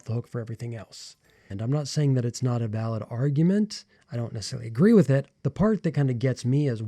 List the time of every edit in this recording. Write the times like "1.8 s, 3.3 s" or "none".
1.6 s, 5.4 s

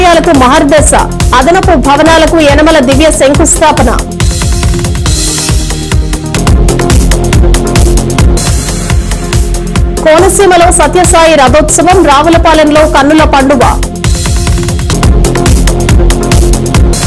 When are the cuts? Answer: none

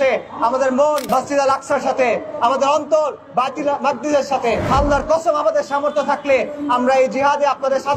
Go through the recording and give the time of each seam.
1.0 s, 4.7 s

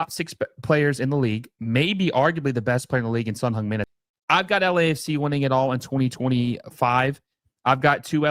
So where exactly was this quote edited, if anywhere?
4.0 s

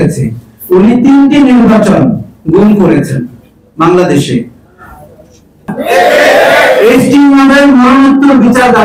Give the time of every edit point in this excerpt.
5.8 s

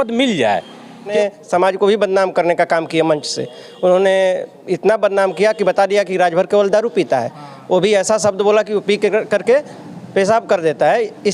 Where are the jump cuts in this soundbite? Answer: 1.1 s

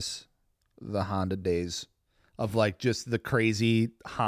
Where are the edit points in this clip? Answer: none

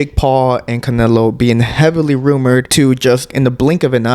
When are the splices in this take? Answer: 3.2 s

